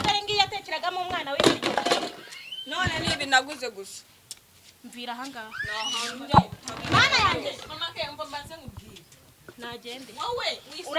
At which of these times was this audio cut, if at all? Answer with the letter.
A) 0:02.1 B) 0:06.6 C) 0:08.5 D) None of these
D